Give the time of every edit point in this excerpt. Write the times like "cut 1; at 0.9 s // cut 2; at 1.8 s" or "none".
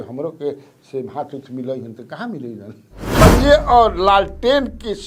cut 1; at 3.2 s